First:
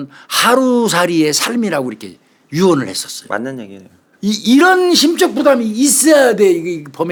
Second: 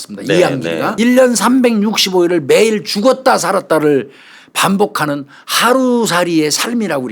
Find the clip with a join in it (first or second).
second